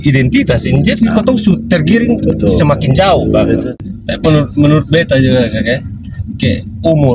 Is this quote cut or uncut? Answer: cut